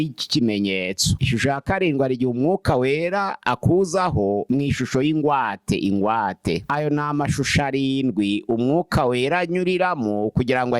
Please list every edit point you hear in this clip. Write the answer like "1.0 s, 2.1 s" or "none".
6.6 s